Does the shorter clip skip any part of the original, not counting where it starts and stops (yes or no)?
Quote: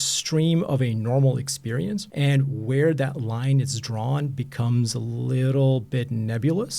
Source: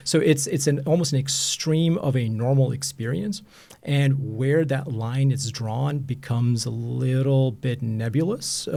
yes